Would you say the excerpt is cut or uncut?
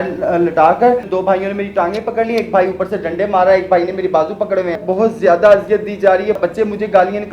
cut